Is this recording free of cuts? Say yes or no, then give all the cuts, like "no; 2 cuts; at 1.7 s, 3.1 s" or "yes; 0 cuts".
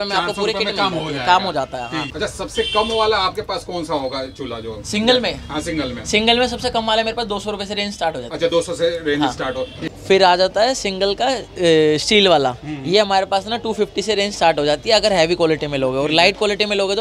no; 2 cuts; at 2.0 s, 9.9 s